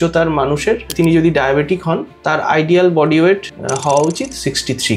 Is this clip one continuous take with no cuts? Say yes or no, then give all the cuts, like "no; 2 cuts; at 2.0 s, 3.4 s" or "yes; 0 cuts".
no; 3 cuts; at 0.9 s, 2.1 s, 3.5 s